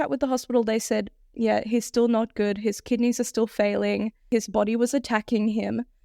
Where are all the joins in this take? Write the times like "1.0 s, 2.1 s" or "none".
4.3 s